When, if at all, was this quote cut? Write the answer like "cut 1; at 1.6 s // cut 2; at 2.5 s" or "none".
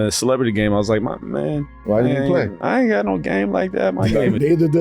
cut 1; at 2.6 s